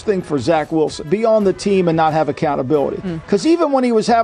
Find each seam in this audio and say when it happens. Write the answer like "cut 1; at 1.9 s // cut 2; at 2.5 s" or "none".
cut 1; at 1.0 s